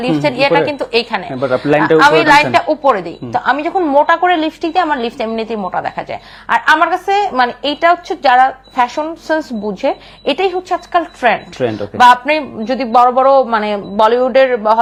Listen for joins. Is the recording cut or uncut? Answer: uncut